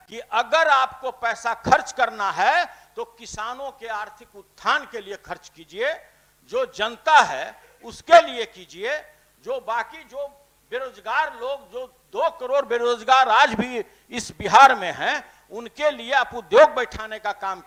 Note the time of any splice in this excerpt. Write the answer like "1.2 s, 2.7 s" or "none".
none